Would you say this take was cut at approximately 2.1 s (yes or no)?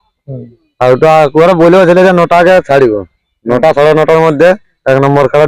no